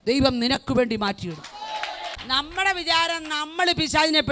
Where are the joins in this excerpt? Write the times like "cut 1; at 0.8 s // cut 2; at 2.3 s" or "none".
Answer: cut 1; at 2.2 s